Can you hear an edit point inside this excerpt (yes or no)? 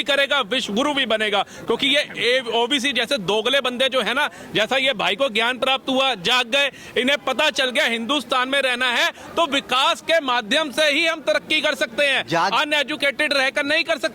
no